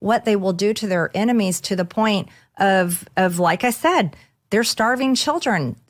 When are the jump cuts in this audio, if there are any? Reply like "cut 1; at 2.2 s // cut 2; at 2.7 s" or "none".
none